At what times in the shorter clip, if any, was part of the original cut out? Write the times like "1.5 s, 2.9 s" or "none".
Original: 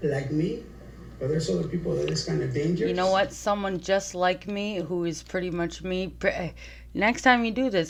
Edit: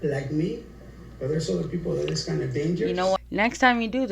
3.2 s